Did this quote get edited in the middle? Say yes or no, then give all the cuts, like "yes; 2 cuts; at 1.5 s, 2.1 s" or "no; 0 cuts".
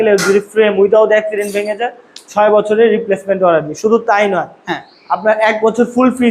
no; 0 cuts